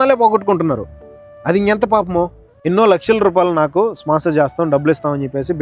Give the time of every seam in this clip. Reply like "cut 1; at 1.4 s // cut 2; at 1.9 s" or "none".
cut 1; at 2.5 s